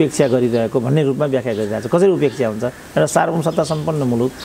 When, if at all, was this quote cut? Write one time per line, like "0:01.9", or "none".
none